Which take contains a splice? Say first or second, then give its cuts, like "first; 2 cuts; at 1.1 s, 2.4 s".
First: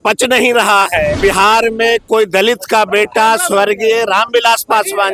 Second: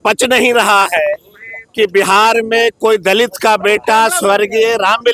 first; 1 cut; at 1.2 s